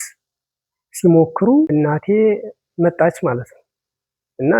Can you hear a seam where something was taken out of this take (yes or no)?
yes